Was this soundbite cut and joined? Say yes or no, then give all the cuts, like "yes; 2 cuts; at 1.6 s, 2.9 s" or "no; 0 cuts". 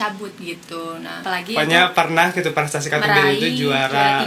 yes; 1 cut; at 1.2 s